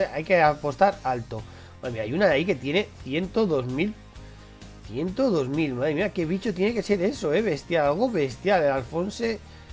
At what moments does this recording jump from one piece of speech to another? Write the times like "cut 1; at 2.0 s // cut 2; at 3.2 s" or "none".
cut 1; at 6.0 s